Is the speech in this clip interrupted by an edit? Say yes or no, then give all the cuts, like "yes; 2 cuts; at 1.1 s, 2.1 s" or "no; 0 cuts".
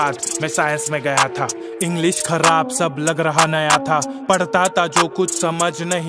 no; 0 cuts